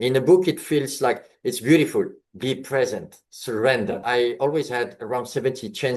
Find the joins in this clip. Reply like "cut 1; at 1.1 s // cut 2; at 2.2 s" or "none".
cut 1; at 4.0 s